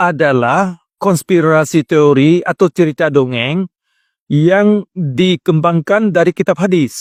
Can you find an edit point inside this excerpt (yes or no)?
no